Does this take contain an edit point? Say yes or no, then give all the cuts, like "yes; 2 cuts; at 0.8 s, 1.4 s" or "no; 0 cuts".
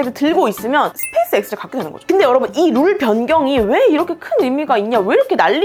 no; 0 cuts